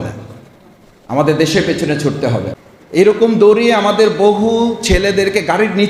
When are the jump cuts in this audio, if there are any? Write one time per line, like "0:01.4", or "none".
0:02.5